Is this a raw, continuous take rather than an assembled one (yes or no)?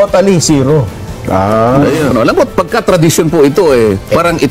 no